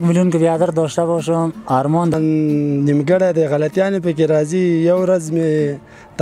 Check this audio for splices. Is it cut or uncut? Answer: cut